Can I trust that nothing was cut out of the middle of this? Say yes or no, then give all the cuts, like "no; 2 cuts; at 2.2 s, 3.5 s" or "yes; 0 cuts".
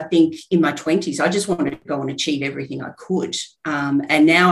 no; 1 cut; at 1.8 s